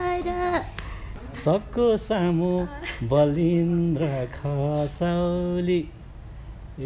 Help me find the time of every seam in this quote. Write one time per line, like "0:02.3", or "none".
0:01.1